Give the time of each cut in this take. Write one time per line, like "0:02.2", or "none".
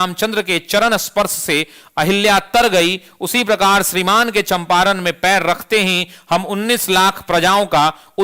none